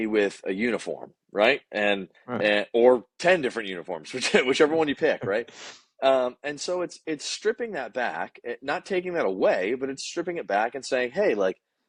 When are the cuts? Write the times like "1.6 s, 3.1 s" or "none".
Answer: none